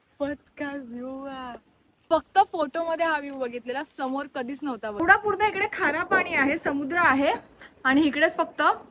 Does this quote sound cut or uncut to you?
cut